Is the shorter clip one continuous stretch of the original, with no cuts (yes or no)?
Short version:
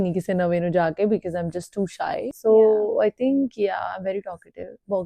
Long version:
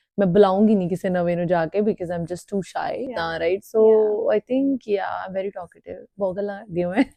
no